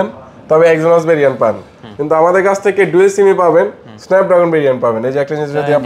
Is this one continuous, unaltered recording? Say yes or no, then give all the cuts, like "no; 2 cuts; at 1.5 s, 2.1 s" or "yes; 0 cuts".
yes; 0 cuts